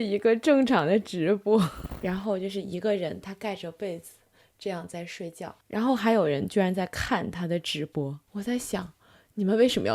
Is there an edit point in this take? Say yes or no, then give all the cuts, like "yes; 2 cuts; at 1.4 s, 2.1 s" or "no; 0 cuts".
yes; 3 cuts; at 1.9 s, 5.6 s, 8.2 s